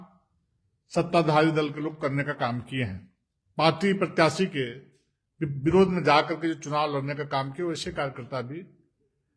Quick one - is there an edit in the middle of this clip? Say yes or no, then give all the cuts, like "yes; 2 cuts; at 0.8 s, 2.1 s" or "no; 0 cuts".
yes; 1 cut; at 3.2 s